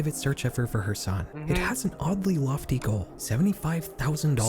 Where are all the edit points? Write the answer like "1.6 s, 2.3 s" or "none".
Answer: 1.3 s, 3.1 s

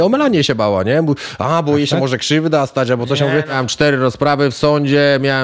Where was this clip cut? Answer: 3.6 s

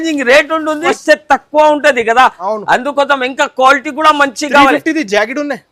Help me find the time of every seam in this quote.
0.9 s

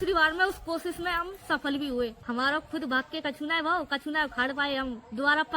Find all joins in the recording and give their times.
2.2 s

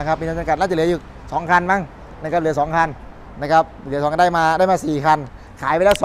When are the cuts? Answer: none

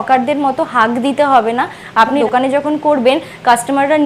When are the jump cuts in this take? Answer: 2.2 s

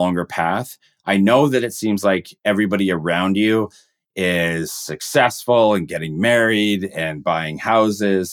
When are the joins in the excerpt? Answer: none

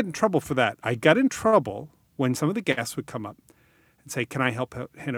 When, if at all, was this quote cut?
2.4 s

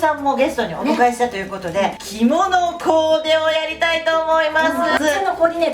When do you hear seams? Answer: 2.0 s, 5.0 s

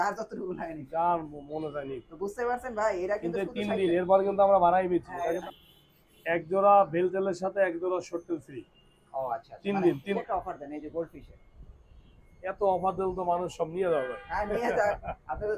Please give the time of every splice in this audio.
5.4 s, 10.2 s

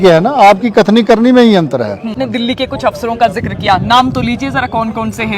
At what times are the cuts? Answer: 2.2 s

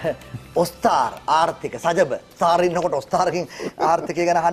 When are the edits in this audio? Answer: 2.3 s

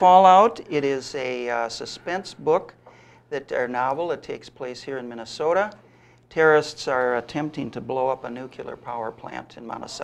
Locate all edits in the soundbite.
none

